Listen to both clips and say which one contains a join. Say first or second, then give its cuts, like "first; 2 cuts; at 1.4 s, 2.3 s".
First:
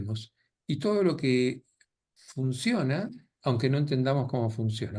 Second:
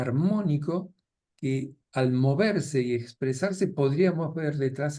second; 1 cut; at 1.8 s